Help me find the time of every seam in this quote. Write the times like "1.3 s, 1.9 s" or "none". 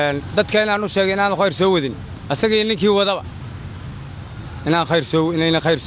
none